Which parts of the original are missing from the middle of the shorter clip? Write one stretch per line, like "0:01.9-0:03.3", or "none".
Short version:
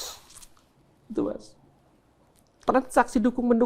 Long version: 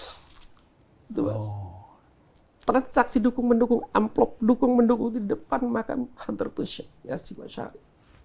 none